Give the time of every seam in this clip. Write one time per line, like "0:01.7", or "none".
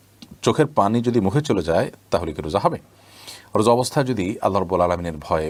none